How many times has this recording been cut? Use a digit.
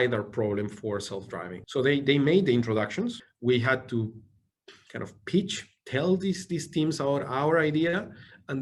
1